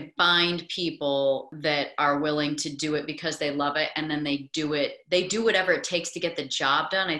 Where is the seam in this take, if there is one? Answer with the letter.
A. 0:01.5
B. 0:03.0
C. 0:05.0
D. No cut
A